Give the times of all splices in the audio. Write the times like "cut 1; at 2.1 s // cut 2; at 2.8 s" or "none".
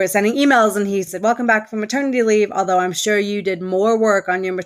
cut 1; at 1.1 s

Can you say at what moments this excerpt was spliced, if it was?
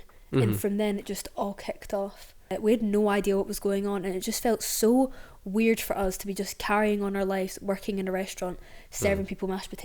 cut 1; at 2.5 s

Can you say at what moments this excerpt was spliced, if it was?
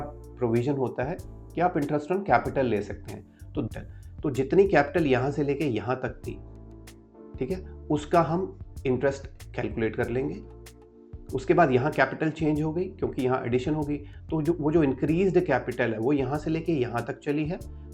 cut 1; at 3.7 s

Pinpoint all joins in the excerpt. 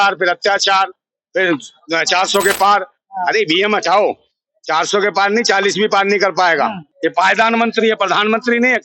cut 1; at 6.8 s

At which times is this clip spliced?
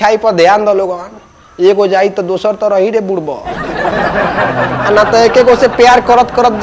none

